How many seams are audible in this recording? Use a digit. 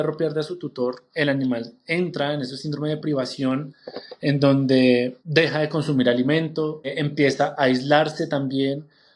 3